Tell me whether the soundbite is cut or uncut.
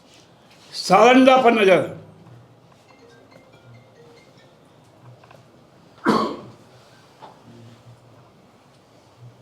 uncut